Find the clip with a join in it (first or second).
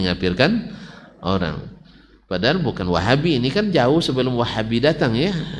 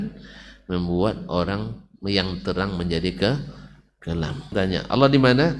second